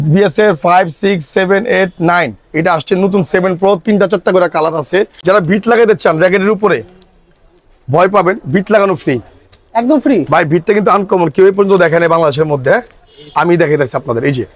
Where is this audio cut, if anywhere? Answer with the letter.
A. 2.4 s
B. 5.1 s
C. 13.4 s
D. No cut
B